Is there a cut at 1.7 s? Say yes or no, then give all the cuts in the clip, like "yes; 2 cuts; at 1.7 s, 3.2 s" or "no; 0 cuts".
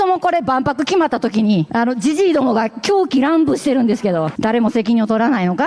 yes; 2 cuts; at 1.7 s, 4.3 s